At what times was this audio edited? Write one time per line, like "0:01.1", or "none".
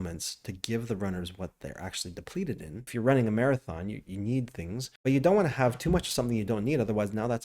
0:02.9
0:04.8